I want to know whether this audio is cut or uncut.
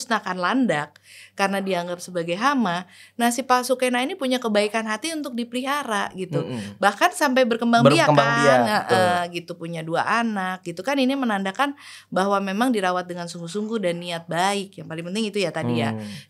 uncut